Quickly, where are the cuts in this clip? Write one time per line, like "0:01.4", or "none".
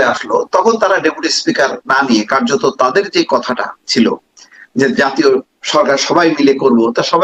none